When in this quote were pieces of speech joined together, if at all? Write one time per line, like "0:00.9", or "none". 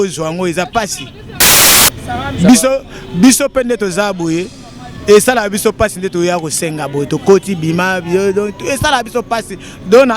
0:01.6